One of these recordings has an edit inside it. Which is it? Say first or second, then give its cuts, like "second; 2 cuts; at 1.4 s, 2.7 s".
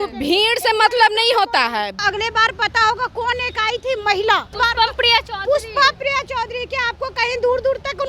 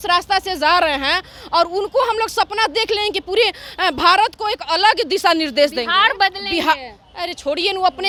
first; 2 cuts; at 2.0 s, 4.5 s